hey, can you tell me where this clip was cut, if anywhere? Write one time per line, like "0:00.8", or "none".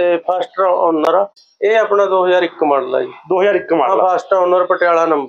0:01.4

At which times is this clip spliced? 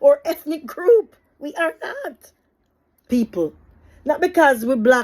0:03.0

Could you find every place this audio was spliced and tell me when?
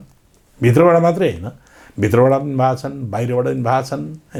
none

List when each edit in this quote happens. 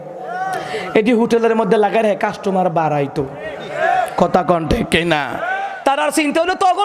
0:05.5

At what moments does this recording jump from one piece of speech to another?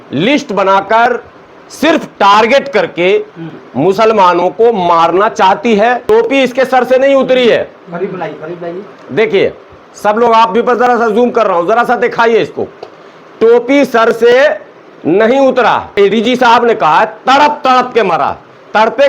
0:06.0
0:16.0

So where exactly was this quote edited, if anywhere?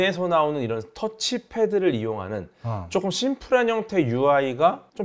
none

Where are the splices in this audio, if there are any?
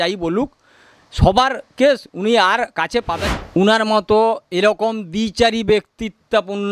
0:03.2

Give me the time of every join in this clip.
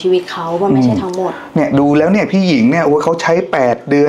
none

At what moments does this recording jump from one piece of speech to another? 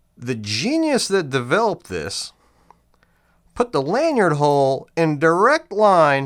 none

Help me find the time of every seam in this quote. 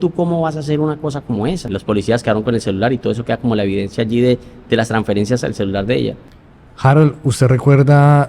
0:01.7
0:06.4

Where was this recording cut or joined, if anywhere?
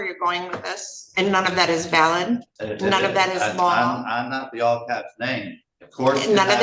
0:02.6

